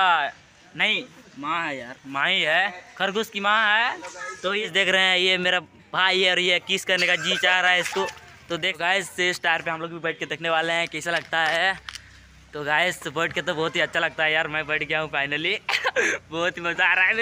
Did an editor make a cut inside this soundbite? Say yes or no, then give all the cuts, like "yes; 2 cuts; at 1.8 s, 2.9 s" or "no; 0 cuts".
yes; 2 cuts; at 4.3 s, 8.7 s